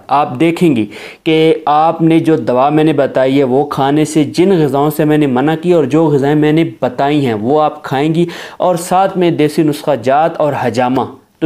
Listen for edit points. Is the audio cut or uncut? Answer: uncut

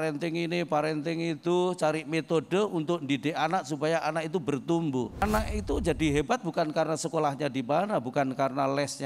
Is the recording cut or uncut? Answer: cut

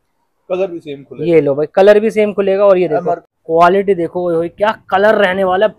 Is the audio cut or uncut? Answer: cut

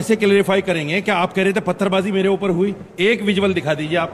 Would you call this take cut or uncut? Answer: uncut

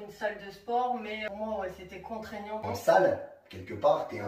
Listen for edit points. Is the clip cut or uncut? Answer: cut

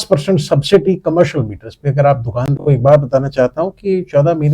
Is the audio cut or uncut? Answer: cut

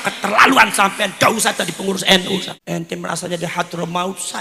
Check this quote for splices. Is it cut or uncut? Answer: cut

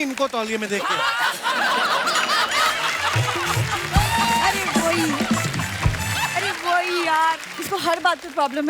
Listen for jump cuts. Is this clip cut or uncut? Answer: cut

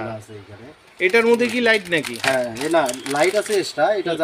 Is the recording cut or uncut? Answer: uncut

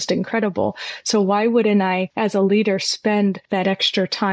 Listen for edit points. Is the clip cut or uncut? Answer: cut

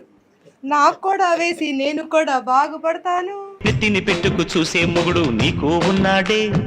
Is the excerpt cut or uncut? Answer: uncut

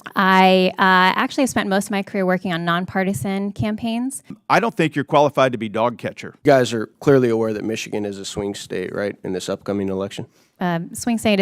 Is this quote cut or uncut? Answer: cut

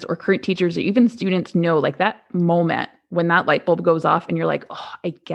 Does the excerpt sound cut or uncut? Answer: uncut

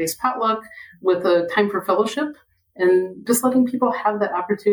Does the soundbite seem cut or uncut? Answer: cut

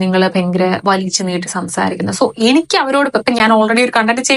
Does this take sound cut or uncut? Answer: uncut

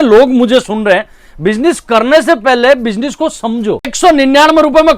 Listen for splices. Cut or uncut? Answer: cut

